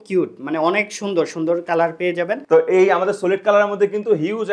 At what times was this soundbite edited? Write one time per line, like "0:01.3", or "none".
0:02.4